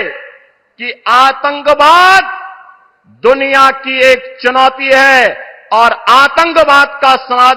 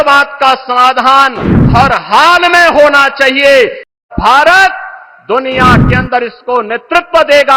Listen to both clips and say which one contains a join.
second; 1 cut; at 4.0 s

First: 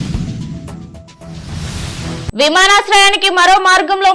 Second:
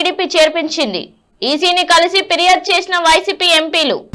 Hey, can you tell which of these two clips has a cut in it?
first; 1 cut; at 2.3 s

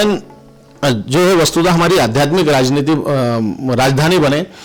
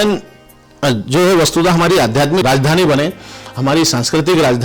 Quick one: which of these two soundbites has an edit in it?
second; 1 cut; at 2.4 s

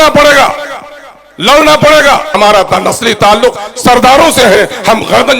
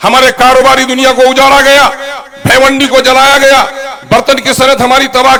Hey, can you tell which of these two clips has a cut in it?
first; 1 cut; at 2.3 s

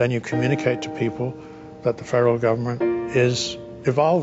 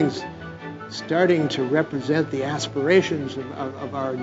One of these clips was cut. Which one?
first; 1 cut; at 2.9 s

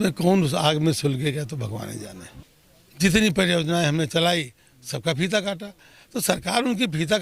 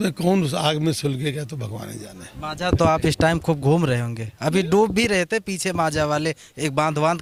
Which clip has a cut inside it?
first; 1 cut; at 2.3 s

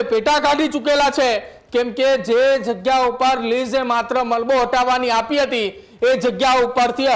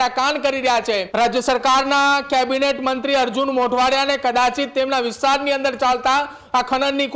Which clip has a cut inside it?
second; 1 cut; at 1.1 s

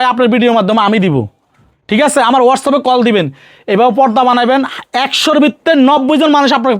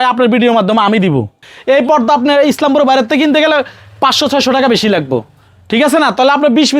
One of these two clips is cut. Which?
second; 1 cut; at 1.5 s

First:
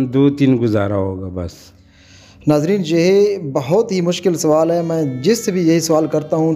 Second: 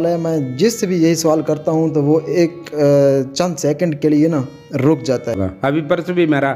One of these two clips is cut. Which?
second; 1 cut; at 5.4 s

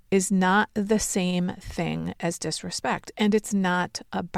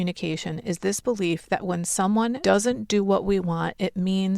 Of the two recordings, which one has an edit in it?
second; 1 cut; at 2.4 s

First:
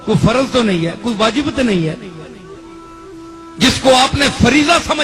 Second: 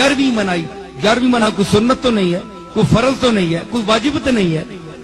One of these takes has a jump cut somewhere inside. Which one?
second; 1 cut; at 1.5 s

